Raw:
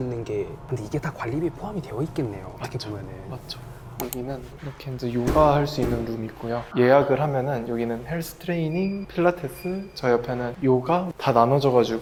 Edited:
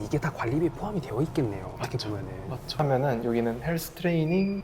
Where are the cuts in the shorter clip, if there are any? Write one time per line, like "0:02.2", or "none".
0:02.8